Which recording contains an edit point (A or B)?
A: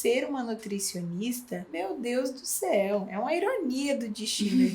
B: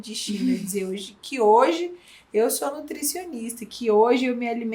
A